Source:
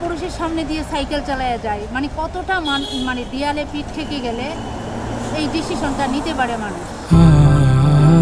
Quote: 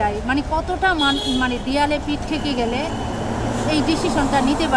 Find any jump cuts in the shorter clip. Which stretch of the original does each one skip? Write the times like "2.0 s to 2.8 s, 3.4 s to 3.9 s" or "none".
none